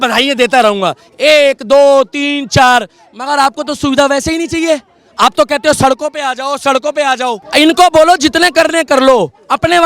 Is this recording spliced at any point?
yes; 1 cut; at 7.4 s

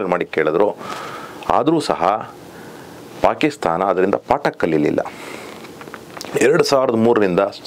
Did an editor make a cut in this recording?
no; 0 cuts

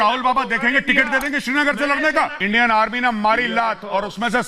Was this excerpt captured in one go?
no; 1 cut; at 2.4 s

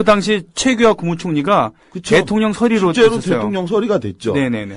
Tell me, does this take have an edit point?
yes; 1 cut; at 1.4 s

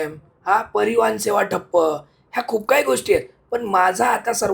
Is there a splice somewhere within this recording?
no; 0 cuts

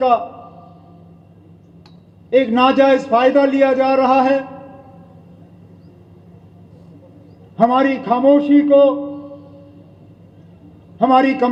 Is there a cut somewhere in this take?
no; 0 cuts

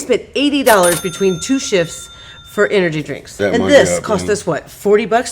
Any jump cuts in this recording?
yes; 1 cut; at 3.4 s

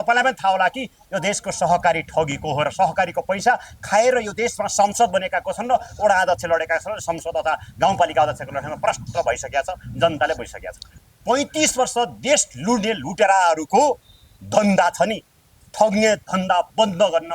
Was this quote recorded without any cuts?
no; 1 cut; at 11.0 s

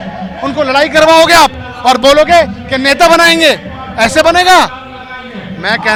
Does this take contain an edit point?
no; 0 cuts

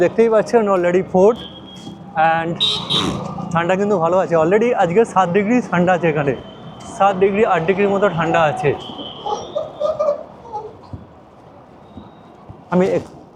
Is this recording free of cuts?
yes; 0 cuts

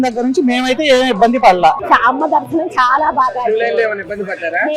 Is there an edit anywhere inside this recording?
yes; 1 cut; at 1.8 s

